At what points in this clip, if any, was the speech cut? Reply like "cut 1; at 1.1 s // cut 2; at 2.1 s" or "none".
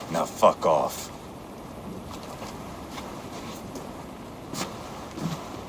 none